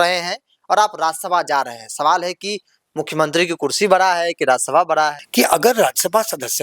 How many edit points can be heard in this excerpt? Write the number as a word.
one